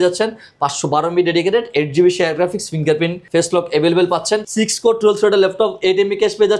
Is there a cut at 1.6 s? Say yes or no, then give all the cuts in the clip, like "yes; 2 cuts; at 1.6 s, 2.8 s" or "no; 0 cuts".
no; 2 cuts; at 3.2 s, 4.4 s